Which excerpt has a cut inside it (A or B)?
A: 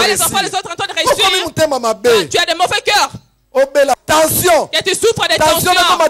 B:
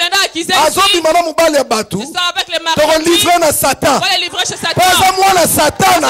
A